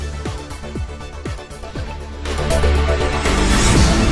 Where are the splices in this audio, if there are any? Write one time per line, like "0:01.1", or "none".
0:01.4

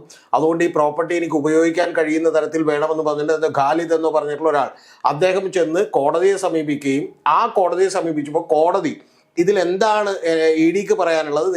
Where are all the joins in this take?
none

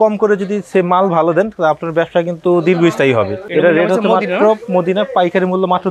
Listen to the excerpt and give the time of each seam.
none

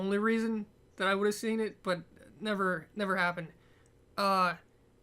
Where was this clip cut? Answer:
0:04.0

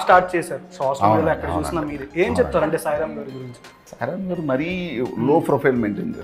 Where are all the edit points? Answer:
0:03.8

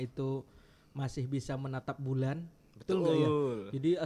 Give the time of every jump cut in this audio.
none

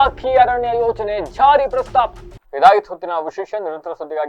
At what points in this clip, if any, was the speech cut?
none

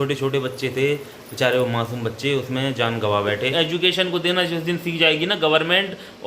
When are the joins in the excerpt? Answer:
0:03.5

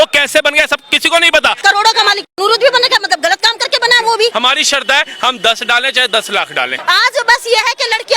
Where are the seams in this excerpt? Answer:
0:01.6
0:04.3
0:06.7

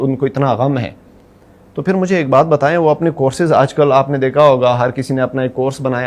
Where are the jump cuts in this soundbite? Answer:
none

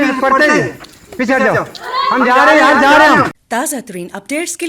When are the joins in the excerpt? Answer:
0:03.4

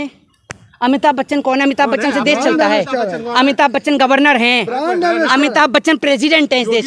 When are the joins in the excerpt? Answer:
none

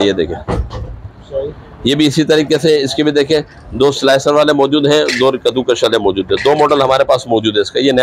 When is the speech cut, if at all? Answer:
none

